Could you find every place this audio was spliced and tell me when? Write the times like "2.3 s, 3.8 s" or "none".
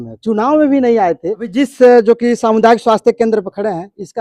1.4 s